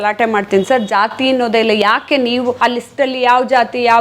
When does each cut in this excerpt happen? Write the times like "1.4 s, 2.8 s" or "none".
2.6 s